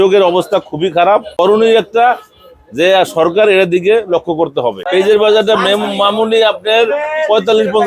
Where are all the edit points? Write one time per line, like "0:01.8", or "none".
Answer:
0:01.3
0:04.8